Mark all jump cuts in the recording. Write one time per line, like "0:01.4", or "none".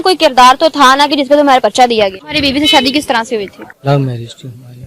0:02.3
0:03.6